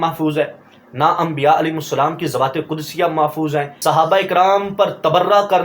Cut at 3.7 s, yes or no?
yes